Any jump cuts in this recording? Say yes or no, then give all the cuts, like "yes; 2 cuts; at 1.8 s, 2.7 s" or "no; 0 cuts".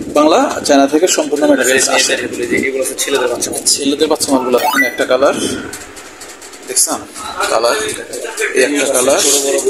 no; 0 cuts